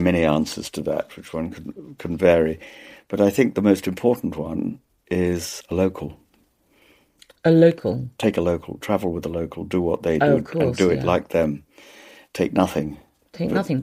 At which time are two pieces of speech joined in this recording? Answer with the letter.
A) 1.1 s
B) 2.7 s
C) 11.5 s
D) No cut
D